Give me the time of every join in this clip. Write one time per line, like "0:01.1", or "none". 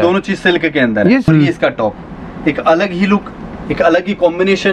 0:01.3